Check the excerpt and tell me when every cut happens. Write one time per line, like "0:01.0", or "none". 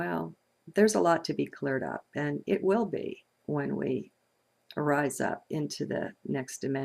0:02.4